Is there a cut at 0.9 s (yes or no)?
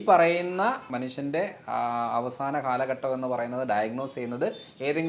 yes